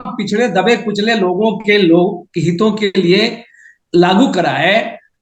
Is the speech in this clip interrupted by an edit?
no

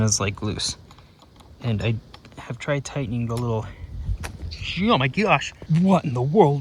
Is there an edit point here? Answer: yes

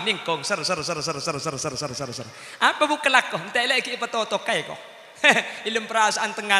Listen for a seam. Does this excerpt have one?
no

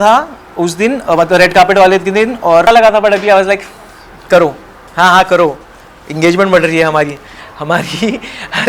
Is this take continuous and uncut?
no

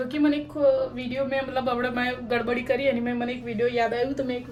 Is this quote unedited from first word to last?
yes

